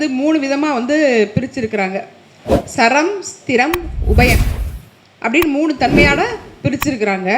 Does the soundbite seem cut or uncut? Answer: uncut